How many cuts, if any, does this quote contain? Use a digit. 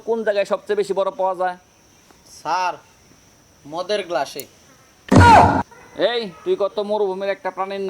1